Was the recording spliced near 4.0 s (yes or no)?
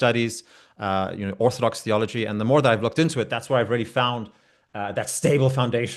no